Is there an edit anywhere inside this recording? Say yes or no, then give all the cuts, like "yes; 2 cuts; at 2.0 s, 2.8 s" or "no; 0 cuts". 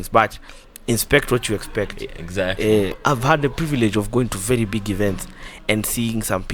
yes; 1 cut; at 2.9 s